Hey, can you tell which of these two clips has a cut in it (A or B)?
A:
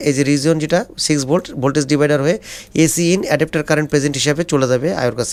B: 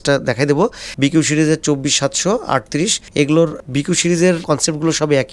B